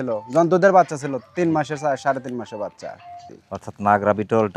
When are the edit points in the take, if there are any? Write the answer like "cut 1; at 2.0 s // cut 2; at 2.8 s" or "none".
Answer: cut 1; at 3.2 s